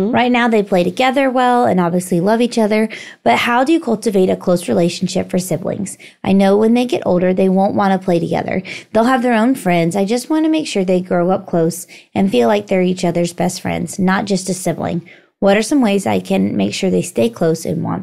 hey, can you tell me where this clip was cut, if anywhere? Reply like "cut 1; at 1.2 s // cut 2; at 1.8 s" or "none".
none